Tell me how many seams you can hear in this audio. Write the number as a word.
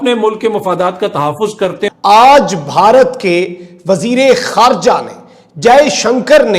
one